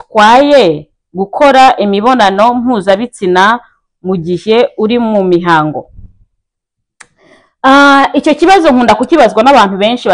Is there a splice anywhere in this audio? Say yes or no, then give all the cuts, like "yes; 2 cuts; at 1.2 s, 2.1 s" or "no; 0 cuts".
no; 0 cuts